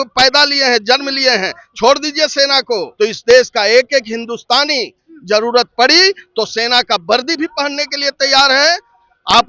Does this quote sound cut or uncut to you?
cut